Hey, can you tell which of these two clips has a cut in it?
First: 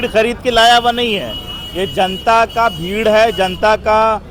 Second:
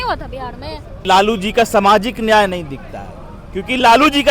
second; 1 cut; at 1.0 s

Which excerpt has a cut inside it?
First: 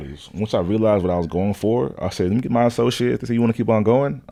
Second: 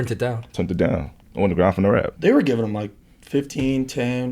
second; 1 cut; at 2.1 s

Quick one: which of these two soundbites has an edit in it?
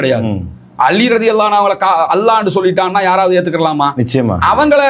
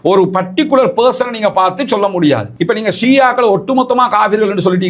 second; 1 cut; at 2.5 s

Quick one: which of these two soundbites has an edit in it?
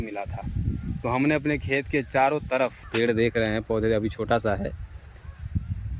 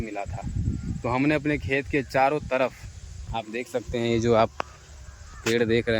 first; 1 cut; at 2.8 s

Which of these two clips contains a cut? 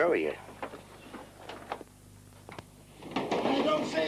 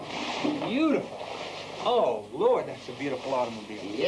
second; 1 cut; at 1.7 s

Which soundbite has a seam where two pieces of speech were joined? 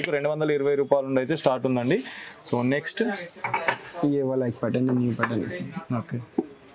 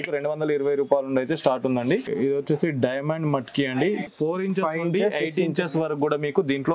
second; 2 cuts; at 2.1 s, 4.1 s

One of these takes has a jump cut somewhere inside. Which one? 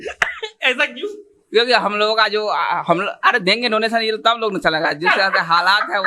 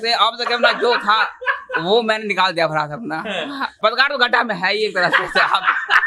second; 1 cut; at 3.8 s

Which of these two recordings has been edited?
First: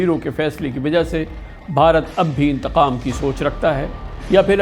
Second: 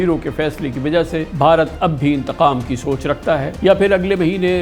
second; 2 cuts; at 1.3 s, 3.5 s

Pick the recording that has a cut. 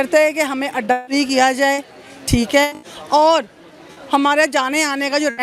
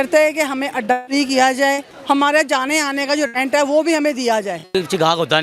second; 2 cuts; at 1.9 s, 4.7 s

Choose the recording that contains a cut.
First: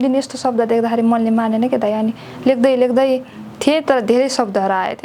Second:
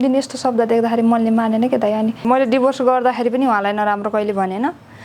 second; 1 cut; at 2.2 s

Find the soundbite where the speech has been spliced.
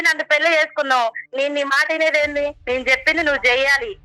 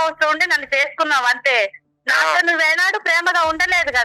first; 2 cuts; at 1.2 s, 2.6 s

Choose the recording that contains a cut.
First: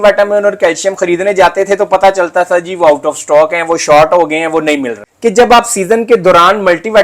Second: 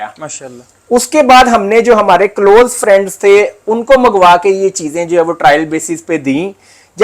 first; 1 cut; at 5.0 s

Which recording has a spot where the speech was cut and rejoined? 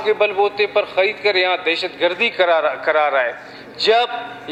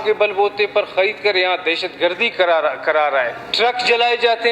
second; 1 cut; at 3.4 s

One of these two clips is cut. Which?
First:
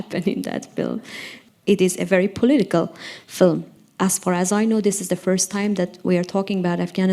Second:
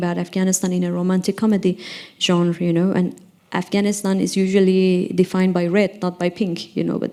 first; 2 cuts; at 1.5 s, 3.8 s

